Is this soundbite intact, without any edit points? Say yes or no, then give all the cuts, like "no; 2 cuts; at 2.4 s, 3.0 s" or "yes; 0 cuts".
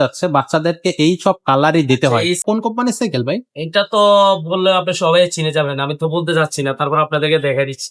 no; 1 cut; at 2.4 s